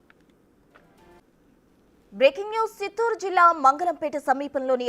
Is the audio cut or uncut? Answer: cut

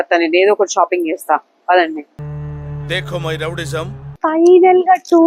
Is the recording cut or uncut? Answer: cut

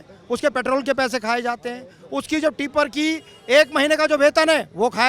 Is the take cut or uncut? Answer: uncut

